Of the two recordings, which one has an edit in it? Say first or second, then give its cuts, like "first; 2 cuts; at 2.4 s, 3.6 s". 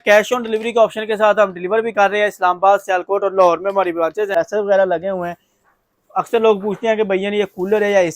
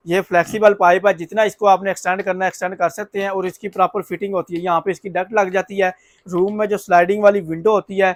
first; 1 cut; at 4.3 s